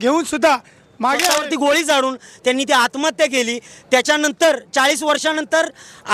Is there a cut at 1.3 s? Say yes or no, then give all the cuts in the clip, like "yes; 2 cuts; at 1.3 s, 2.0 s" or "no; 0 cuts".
yes; 1 cut; at 1.3 s